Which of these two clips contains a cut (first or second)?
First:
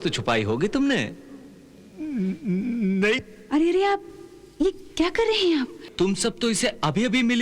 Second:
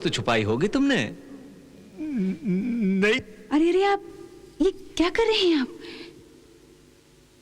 first